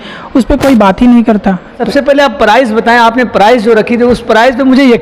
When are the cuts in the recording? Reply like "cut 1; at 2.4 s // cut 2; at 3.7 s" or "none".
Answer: cut 1; at 1.8 s